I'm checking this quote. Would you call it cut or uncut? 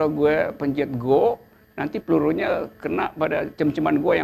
uncut